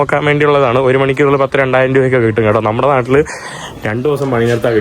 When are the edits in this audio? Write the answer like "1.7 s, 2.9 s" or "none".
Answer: none